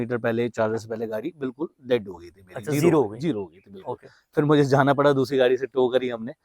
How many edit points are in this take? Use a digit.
0